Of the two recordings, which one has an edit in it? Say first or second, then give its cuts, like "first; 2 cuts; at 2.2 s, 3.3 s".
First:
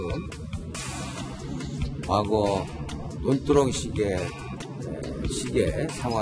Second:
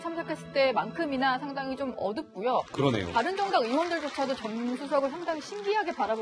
first; 1 cut; at 5.0 s